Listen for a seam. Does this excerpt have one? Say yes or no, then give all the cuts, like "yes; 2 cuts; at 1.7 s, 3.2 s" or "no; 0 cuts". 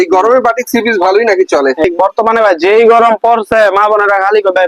yes; 1 cut; at 1.8 s